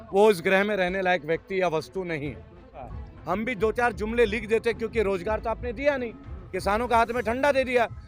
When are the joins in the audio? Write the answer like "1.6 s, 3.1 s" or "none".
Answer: 2.9 s